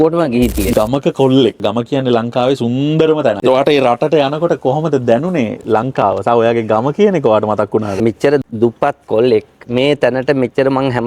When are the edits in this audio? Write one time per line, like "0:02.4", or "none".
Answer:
0:00.7
0:01.6
0:07.9